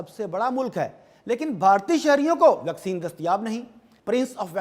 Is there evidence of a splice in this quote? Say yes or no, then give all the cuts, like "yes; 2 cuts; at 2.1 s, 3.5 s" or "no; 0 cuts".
no; 0 cuts